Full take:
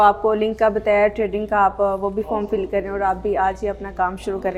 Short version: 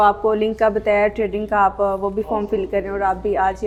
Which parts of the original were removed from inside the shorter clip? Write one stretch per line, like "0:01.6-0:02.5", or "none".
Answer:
none